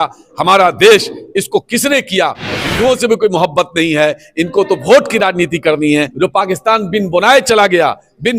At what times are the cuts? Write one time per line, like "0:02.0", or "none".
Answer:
0:02.7
0:06.1